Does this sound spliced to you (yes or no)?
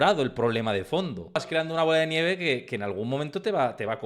yes